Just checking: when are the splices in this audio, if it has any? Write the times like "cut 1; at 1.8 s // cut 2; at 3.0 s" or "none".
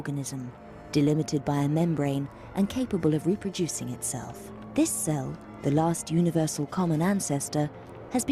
cut 1; at 1.6 s